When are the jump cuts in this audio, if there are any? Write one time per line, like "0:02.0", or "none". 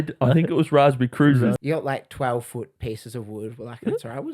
0:01.6

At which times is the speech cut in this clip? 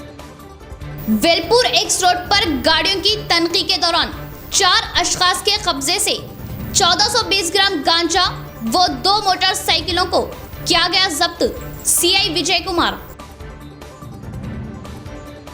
0:00.9

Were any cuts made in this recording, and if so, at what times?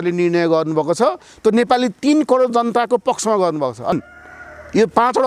0:04.0

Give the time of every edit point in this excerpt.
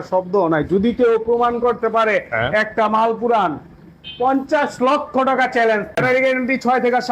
0:06.0

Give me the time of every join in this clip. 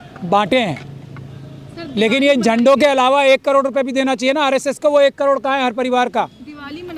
none

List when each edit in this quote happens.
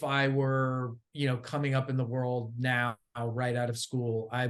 none

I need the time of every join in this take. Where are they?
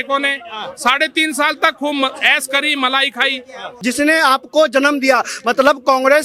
0:03.7

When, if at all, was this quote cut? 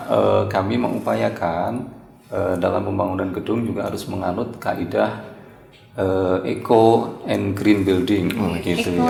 none

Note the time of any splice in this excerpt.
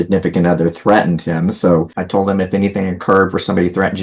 0:02.0

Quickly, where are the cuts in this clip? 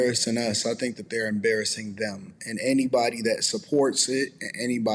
none

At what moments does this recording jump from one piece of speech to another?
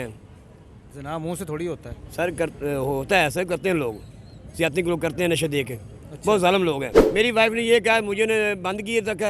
0:07.0

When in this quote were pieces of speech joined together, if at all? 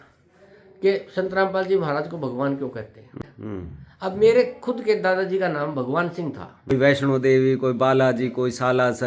0:03.2
0:06.7

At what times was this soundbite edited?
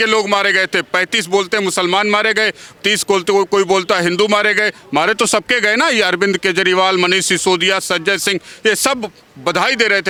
none

